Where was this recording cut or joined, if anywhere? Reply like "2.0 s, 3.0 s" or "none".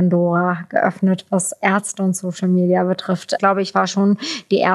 3.4 s